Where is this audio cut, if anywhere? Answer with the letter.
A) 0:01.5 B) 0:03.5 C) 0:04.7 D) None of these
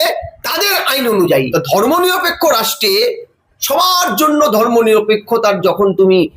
A